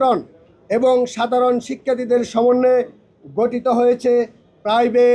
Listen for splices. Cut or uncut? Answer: uncut